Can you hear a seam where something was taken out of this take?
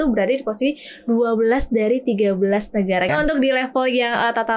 yes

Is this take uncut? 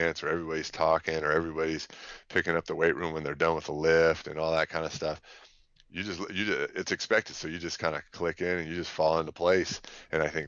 yes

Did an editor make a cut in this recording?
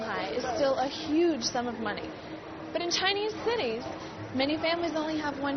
yes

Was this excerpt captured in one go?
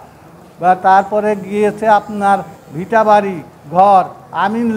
yes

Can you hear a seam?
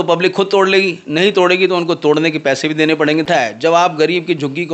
yes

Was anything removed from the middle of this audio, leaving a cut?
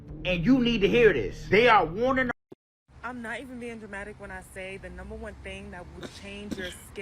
yes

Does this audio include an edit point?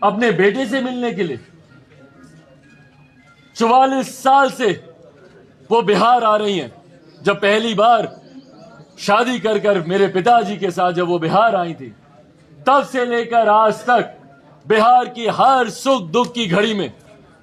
no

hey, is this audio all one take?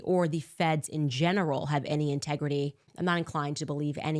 no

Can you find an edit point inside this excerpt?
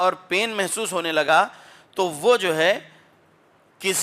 no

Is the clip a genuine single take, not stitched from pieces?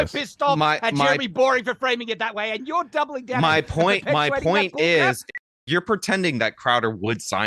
no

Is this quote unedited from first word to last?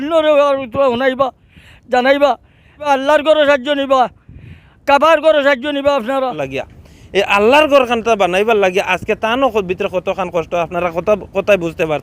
no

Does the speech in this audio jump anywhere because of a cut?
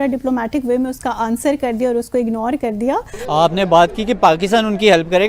yes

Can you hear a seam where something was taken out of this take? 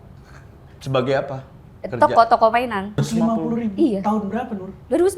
yes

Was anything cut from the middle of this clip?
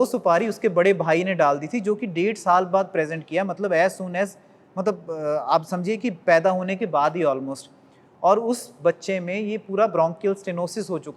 no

